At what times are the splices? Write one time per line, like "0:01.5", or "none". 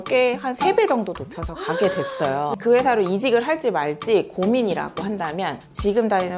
0:02.6